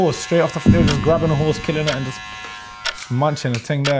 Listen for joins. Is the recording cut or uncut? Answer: uncut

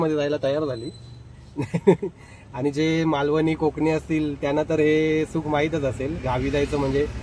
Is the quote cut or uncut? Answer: uncut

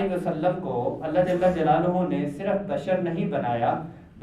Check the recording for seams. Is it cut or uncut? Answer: uncut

